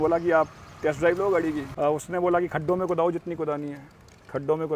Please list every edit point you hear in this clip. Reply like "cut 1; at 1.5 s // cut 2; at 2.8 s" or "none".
cut 1; at 1.7 s